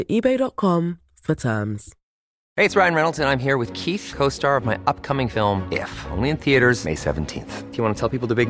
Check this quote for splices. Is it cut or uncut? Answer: cut